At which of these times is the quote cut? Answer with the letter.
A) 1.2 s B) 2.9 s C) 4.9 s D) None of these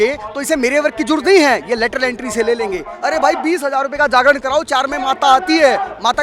B